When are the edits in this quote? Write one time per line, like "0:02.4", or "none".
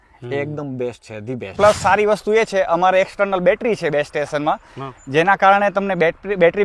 0:01.6